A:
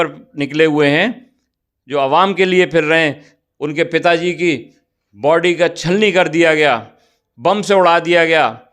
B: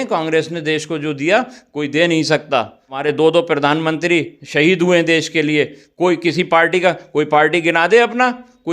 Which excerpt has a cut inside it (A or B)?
B